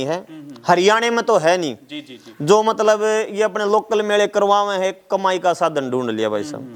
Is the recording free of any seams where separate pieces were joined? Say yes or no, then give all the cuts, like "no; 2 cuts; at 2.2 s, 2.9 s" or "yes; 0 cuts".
yes; 0 cuts